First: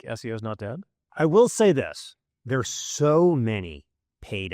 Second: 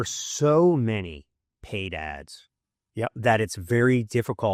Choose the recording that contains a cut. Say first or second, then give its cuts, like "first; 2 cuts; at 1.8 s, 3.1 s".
first; 1 cut; at 1.0 s